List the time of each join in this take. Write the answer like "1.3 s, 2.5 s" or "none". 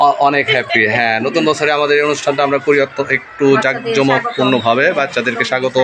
none

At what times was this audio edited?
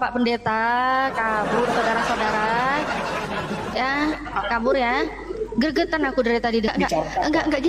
6.7 s

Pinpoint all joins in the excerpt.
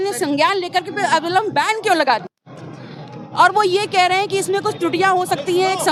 none

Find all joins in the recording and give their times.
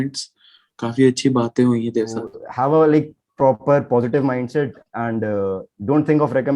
2.4 s

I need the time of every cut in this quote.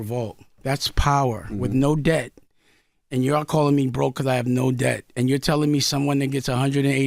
none

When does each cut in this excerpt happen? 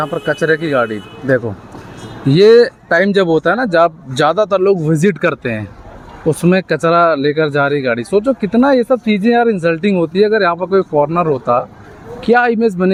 none

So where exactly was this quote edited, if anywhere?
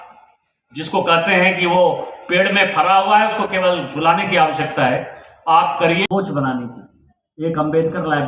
6.1 s

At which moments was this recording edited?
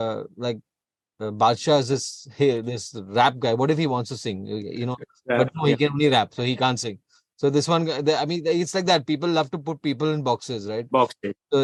none

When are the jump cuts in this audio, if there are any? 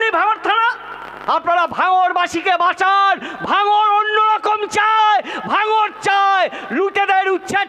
1.2 s

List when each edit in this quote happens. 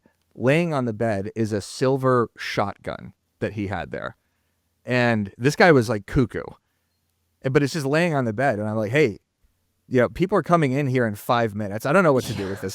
none

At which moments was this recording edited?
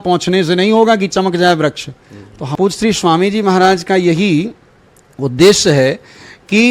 2.5 s

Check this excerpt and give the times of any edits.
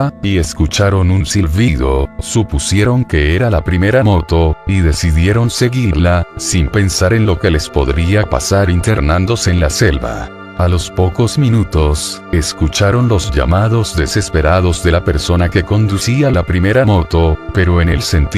9.0 s

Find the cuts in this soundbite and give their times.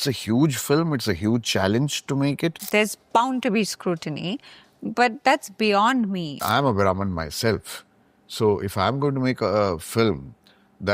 2.6 s, 6.4 s

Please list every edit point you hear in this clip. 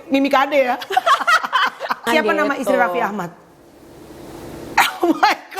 2.0 s

